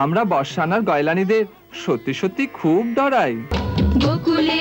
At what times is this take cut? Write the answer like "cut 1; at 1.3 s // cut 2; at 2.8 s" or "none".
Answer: cut 1; at 3.6 s